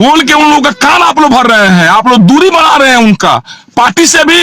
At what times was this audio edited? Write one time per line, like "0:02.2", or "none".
none